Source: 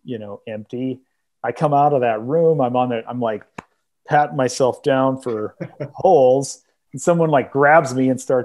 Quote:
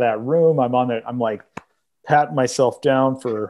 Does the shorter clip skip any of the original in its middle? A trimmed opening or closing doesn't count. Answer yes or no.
no